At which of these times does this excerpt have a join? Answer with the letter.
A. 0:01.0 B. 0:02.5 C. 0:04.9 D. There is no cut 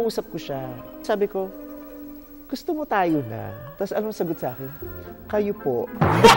A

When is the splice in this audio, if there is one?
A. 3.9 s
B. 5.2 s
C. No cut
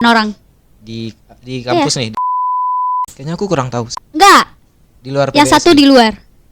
A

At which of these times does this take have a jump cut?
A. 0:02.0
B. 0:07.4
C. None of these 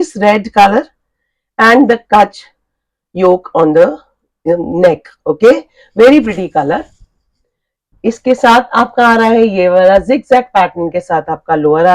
C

